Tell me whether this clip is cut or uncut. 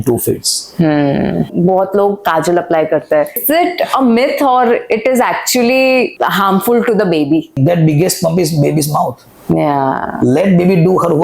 cut